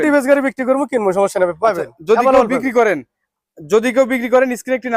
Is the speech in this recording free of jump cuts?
yes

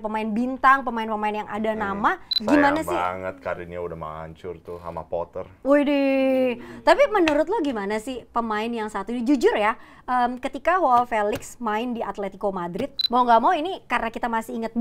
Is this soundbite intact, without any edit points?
no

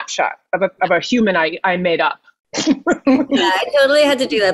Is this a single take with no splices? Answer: no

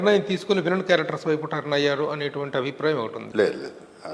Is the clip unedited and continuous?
no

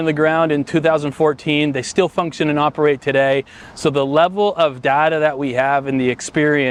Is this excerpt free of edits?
yes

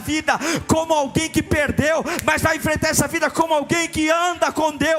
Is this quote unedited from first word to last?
yes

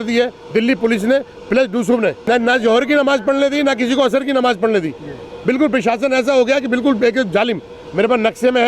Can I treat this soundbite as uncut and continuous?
no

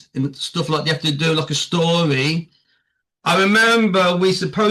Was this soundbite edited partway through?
no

